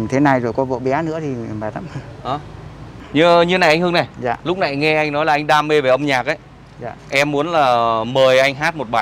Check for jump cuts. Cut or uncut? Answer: cut